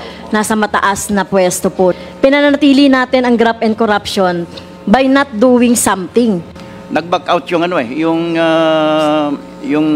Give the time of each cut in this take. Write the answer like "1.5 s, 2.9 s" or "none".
1.9 s, 6.6 s